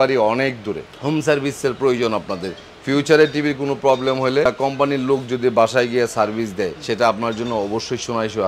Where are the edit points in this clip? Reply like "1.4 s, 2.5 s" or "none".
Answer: 4.5 s, 6.8 s